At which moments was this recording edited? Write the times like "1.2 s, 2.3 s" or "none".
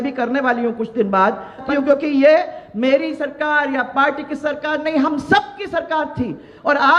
1.7 s

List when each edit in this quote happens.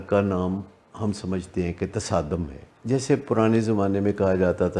2.6 s

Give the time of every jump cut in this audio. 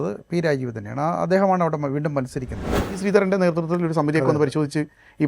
2.9 s

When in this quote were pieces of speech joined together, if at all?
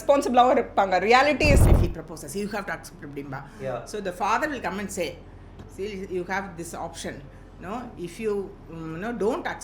1.6 s

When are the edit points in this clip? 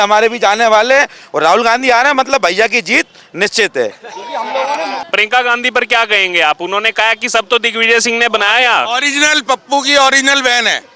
5.0 s

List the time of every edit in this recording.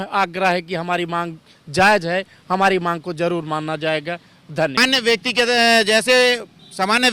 4.8 s

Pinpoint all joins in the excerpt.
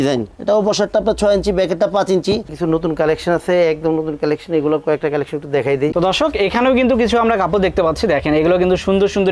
2.5 s, 5.9 s

